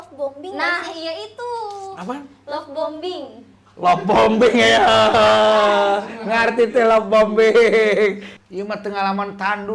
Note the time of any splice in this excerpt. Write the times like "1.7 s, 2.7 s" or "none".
8.3 s